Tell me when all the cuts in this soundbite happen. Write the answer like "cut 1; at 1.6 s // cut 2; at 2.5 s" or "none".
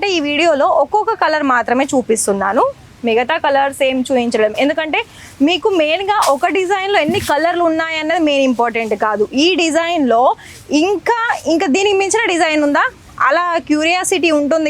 none